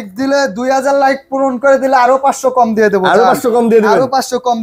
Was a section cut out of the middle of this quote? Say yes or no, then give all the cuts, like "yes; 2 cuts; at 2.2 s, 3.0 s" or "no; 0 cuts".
no; 0 cuts